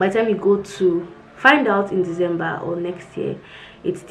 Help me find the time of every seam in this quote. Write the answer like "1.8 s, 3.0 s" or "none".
none